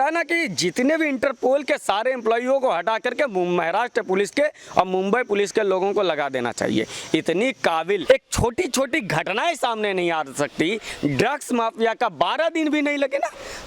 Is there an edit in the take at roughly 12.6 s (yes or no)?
no